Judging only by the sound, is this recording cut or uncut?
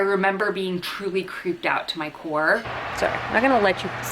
cut